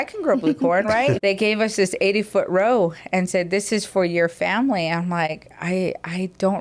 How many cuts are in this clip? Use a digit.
1